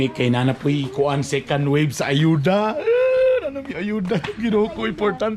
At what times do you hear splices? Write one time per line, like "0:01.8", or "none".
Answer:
none